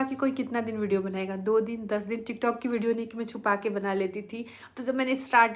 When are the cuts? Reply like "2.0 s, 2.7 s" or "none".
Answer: none